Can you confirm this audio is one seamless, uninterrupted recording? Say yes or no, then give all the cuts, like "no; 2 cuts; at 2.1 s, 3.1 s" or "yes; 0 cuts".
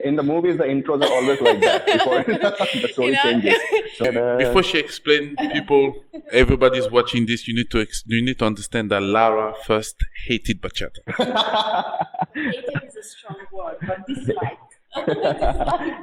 no; 1 cut; at 4.1 s